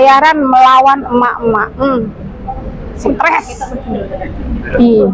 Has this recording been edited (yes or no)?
no